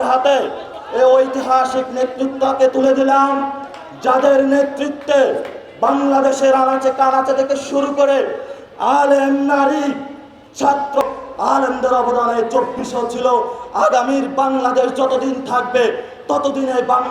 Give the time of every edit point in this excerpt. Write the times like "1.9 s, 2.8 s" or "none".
11.0 s